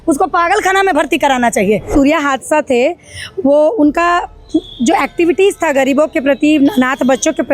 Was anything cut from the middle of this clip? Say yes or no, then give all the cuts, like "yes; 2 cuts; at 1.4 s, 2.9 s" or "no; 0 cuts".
yes; 1 cut; at 1.9 s